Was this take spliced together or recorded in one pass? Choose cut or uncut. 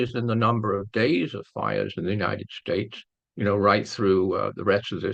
uncut